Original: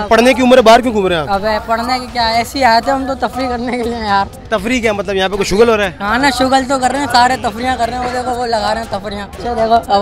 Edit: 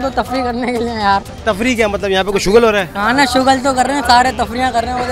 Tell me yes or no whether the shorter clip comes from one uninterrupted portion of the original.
yes